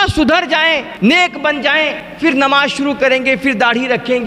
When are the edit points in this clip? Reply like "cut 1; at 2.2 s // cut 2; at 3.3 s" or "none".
cut 1; at 2.0 s